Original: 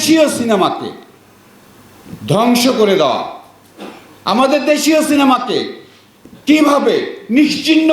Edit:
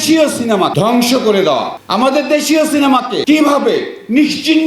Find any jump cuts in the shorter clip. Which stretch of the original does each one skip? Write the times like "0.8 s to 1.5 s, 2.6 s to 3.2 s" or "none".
0.7 s to 2.3 s, 3.3 s to 4.1 s, 5.5 s to 6.4 s

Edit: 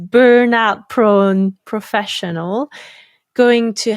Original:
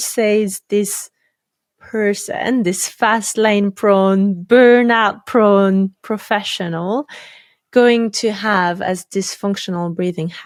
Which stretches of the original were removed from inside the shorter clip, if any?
none

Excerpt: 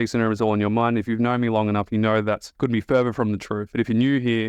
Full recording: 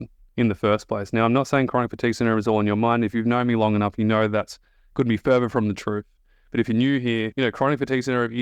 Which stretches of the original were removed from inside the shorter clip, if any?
4.5 s to 4.8 s, 5.9 s to 6.4 s

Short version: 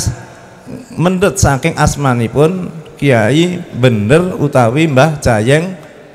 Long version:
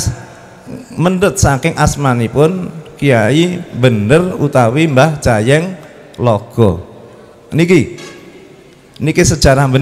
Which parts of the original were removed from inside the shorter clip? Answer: none

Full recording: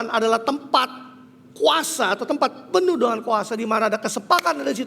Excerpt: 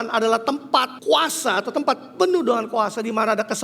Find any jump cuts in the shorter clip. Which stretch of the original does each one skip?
0.9 s to 1.5 s

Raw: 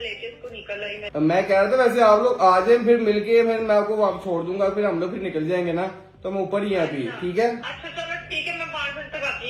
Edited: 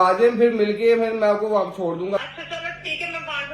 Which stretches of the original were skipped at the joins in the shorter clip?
4.6 s to 7.6 s

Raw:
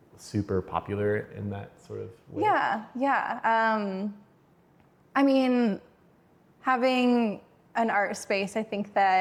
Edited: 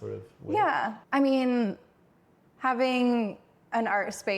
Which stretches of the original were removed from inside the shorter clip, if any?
2.9 s to 5.0 s

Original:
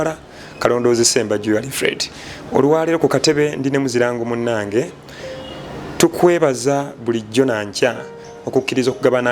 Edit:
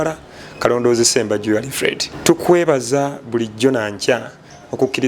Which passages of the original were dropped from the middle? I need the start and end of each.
2.1 s to 5.8 s

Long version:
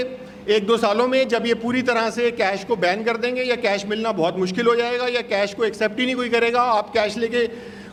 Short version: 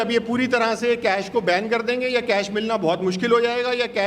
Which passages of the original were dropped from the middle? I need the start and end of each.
none

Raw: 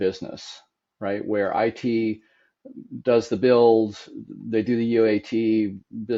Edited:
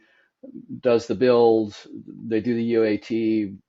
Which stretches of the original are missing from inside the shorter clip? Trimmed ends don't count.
none

